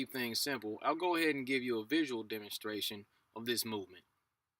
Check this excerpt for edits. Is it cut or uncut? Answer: cut